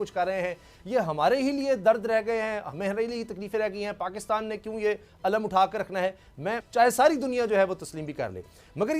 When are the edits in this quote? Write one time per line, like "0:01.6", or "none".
0:06.6